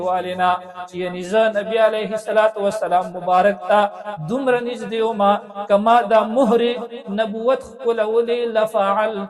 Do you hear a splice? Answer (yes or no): no